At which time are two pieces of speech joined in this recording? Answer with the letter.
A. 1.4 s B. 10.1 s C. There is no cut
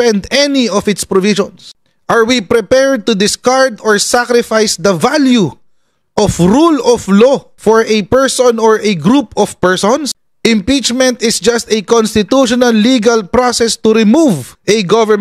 B